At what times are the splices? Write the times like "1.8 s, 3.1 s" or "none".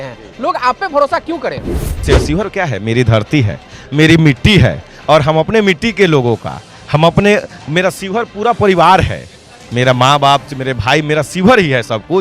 2.1 s